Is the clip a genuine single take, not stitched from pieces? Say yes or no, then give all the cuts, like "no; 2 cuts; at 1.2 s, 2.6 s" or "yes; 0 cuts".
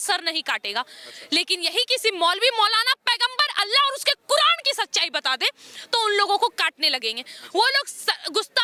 yes; 0 cuts